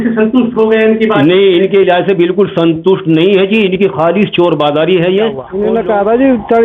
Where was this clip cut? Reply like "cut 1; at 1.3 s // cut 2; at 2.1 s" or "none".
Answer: cut 1; at 5.5 s

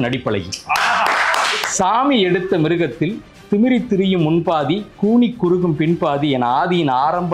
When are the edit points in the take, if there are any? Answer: cut 1; at 1.6 s

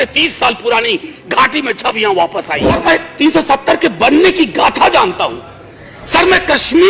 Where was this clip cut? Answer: cut 1; at 2.8 s

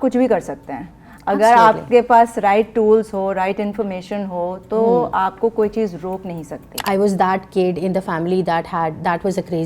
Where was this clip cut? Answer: cut 1; at 6.8 s

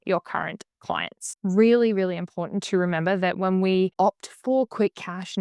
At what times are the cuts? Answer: cut 1; at 1.3 s // cut 2; at 3.9 s

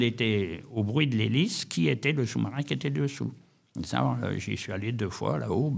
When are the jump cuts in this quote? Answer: none

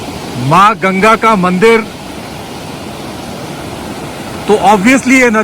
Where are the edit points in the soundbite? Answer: cut 1; at 2.0 s

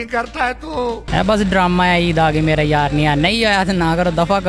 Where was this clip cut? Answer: cut 1; at 1.0 s

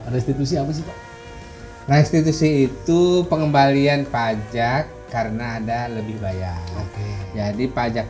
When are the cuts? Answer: none

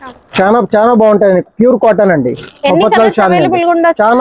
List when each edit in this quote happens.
none

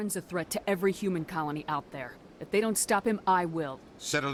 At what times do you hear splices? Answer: none

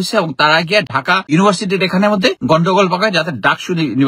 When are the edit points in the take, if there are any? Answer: cut 1; at 1.1 s // cut 2; at 2.4 s

